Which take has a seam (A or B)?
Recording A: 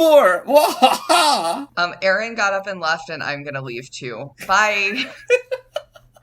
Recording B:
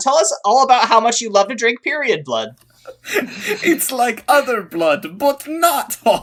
A